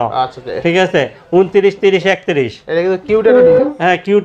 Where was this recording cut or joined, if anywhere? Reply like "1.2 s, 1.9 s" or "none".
none